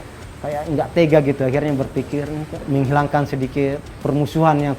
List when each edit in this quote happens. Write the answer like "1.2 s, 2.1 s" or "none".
2.6 s, 3.9 s